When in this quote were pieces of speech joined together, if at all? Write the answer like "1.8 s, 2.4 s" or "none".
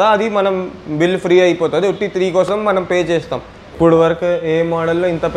3.7 s